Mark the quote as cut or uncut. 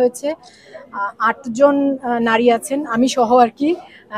uncut